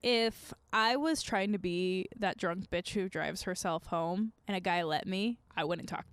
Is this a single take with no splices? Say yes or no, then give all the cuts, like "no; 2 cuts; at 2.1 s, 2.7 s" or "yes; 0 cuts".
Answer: yes; 0 cuts